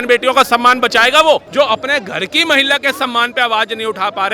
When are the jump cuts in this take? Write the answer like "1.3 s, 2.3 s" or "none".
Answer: 1.5 s